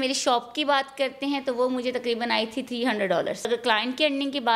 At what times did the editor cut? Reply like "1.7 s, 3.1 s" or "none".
3.5 s